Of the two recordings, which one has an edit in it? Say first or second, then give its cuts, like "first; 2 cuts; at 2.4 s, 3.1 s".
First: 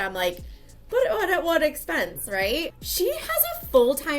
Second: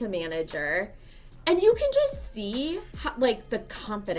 first; 1 cut; at 2.7 s